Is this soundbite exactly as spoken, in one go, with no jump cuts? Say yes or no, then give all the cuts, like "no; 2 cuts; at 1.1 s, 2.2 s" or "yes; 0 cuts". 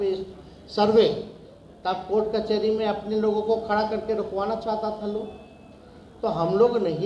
yes; 0 cuts